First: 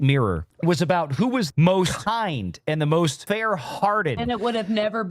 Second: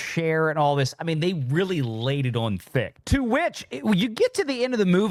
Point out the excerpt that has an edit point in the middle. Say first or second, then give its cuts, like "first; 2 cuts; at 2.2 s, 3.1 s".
first; 3 cuts; at 1.5 s, 3.2 s, 4.2 s